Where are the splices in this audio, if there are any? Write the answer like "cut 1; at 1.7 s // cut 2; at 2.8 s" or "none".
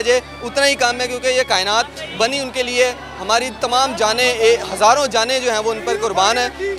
none

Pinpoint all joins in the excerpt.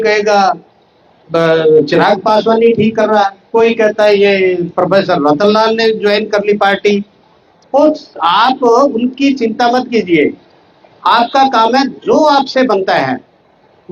none

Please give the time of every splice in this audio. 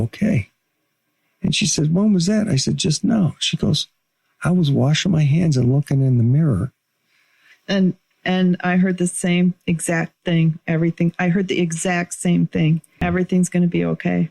cut 1; at 13.0 s

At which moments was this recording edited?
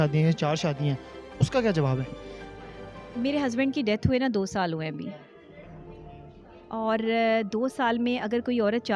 none

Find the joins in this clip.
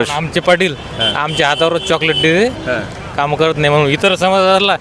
none

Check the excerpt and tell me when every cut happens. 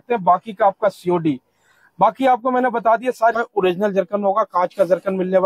cut 1; at 3.7 s

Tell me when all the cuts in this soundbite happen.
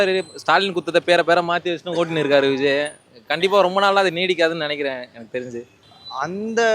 none

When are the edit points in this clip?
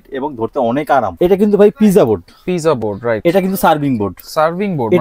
cut 1; at 1.1 s

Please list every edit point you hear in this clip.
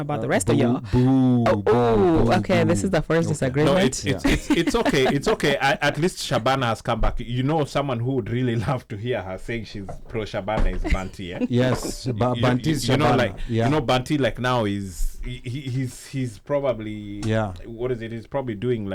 none

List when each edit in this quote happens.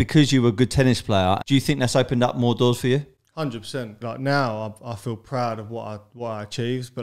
cut 1; at 1.4 s // cut 2; at 4.0 s

